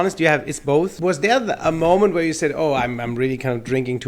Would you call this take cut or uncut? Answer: cut